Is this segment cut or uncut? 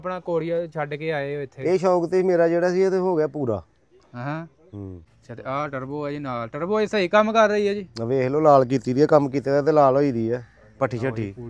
cut